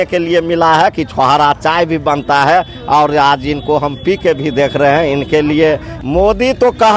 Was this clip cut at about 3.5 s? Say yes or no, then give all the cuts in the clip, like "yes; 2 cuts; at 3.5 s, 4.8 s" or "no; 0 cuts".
no; 1 cut; at 5.9 s